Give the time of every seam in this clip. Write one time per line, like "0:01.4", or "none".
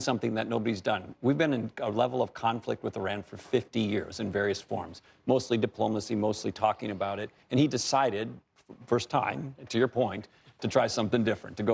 none